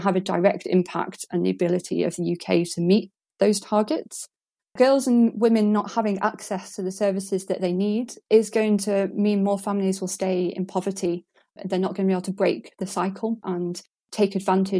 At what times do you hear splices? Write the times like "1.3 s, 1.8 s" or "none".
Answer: none